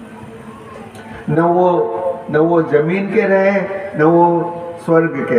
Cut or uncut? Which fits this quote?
uncut